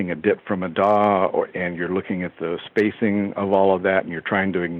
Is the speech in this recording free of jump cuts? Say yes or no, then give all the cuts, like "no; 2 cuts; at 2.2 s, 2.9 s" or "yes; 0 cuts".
yes; 0 cuts